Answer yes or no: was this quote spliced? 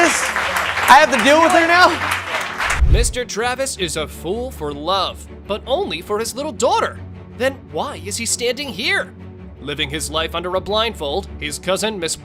no